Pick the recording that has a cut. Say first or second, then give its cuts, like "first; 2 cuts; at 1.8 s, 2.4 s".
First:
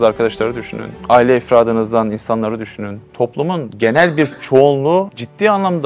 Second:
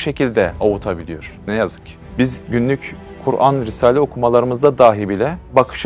second; 1 cut; at 1.9 s